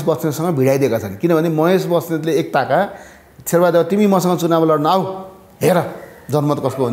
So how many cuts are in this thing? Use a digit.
0